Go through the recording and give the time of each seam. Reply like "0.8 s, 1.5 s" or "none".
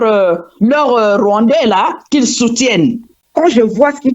3.1 s